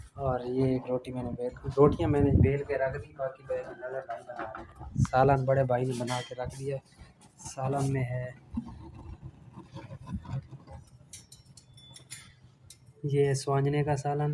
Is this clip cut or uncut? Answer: uncut